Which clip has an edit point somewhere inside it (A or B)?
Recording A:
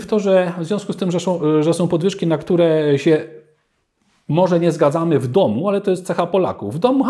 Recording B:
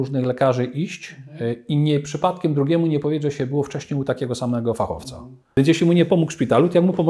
B